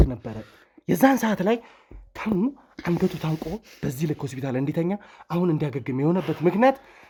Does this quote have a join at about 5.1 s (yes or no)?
no